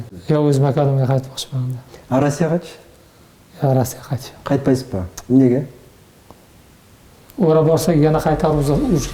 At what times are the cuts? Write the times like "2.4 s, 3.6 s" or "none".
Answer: 5.9 s